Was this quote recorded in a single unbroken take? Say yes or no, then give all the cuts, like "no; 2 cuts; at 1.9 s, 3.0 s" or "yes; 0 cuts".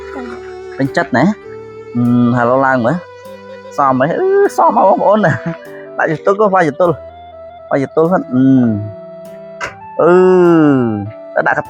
yes; 0 cuts